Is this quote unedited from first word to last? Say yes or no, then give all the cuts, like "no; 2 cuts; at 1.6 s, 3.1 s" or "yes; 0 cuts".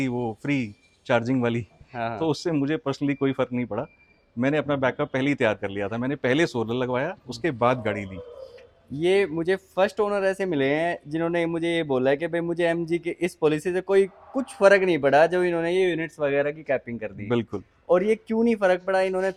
yes; 0 cuts